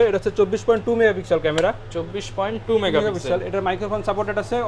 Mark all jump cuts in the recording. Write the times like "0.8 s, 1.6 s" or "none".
none